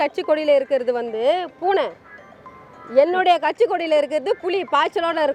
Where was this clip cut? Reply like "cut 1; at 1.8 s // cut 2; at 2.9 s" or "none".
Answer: none